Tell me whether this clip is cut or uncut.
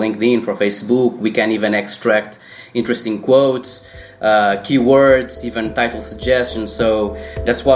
uncut